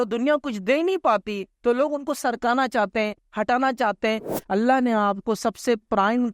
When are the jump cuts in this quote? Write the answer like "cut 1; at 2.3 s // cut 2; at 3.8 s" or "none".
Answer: cut 1; at 4.4 s